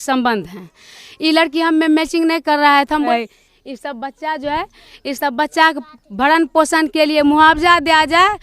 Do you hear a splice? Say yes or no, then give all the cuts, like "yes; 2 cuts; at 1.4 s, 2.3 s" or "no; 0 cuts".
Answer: yes; 1 cut; at 3.1 s